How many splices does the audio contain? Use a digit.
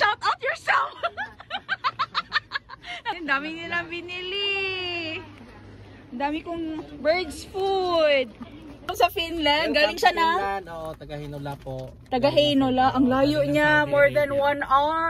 2